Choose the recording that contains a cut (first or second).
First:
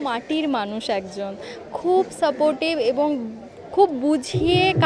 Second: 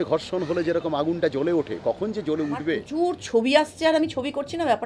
second